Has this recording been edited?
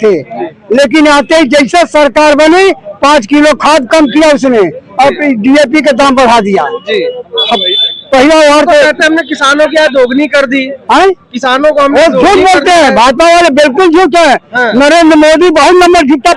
no; 0 cuts

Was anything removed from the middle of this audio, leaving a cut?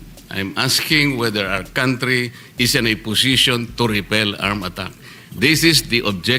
no; 0 cuts

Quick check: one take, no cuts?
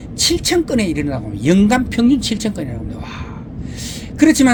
yes; 0 cuts

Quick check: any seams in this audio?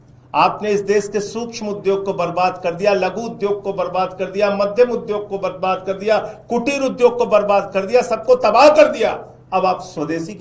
no; 0 cuts

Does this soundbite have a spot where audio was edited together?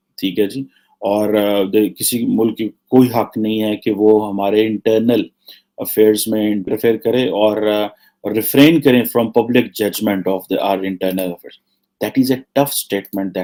no; 0 cuts

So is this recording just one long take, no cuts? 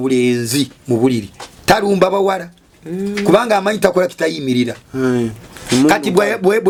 yes; 0 cuts

